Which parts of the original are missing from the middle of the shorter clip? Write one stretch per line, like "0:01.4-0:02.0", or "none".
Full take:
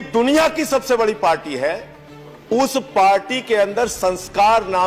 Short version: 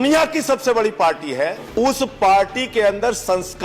0:01.8-0:02.4